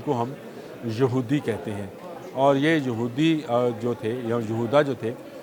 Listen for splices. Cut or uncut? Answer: uncut